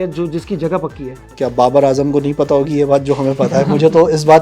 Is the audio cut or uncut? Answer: cut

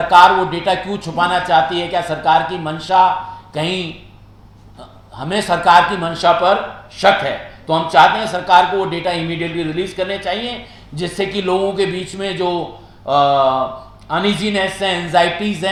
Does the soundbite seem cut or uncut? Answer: uncut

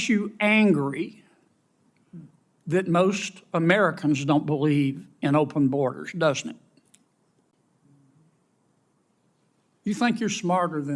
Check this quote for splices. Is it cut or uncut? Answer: cut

